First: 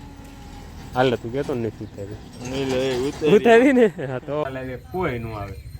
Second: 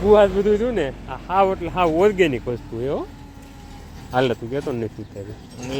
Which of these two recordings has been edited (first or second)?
first